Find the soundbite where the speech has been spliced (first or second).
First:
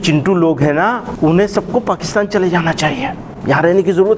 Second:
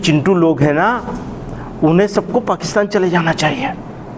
first